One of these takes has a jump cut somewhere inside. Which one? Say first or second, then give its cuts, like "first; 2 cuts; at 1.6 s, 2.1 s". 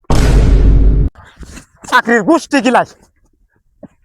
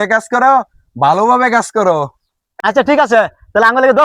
first; 1 cut; at 1.1 s